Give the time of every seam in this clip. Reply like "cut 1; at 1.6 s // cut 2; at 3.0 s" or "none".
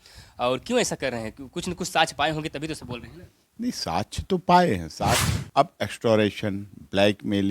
cut 1; at 5.3 s